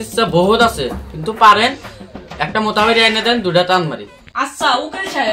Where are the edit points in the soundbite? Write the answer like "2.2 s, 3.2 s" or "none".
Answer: 4.1 s